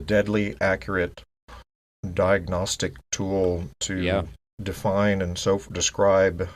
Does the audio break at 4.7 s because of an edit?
yes; 1 cut; at 4.7 s

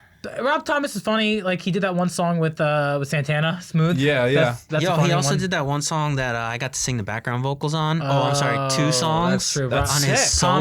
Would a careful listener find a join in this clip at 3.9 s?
no; 0 cuts

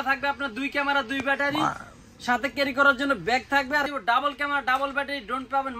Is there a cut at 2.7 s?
no; 1 cut; at 3.9 s

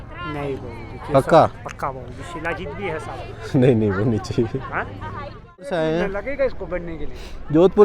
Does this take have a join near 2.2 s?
no; 1 cut; at 5.7 s

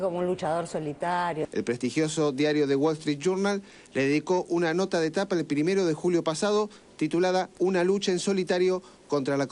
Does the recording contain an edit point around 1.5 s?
yes; 1 cut; at 1.5 s

